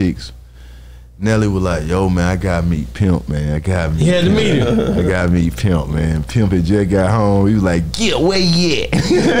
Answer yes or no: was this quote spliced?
no